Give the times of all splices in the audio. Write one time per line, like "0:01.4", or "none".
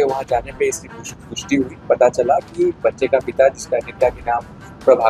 none